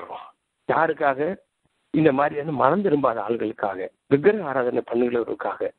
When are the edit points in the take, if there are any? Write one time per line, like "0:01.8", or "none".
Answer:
none